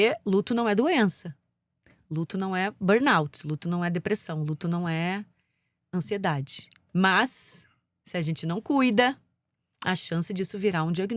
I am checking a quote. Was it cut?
no; 0 cuts

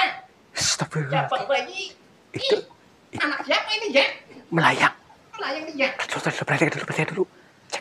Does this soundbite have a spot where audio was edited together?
yes; 1 cut; at 4.4 s

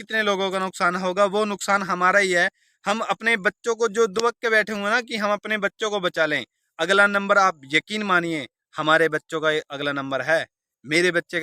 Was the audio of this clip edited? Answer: no; 0 cuts

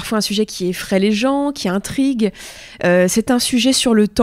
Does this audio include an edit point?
no; 0 cuts

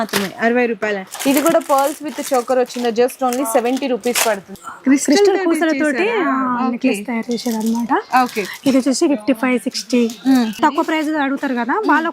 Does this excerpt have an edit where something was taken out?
yes; 3 cuts; at 1.1 s, 4.5 s, 10.6 s

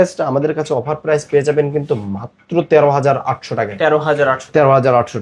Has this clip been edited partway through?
no; 0 cuts

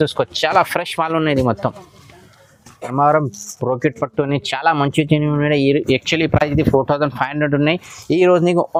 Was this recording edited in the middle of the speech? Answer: no; 0 cuts

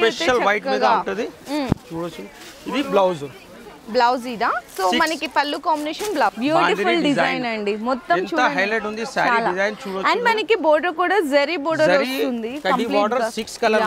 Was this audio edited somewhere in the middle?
yes; 1 cut; at 6.4 s

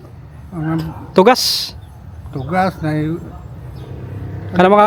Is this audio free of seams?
yes; 0 cuts

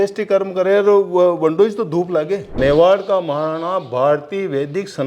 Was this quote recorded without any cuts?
no; 1 cut; at 2.6 s

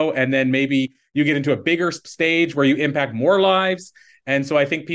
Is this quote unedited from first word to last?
no; 1 cut; at 2.0 s

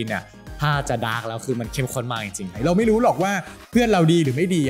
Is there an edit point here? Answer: yes; 1 cut; at 2.5 s

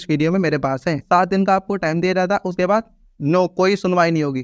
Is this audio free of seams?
no; 1 cut; at 1.0 s

